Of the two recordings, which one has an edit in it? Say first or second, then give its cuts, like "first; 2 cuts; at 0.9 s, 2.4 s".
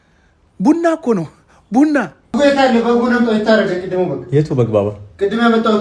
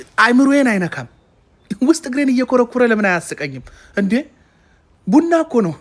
first; 1 cut; at 2.3 s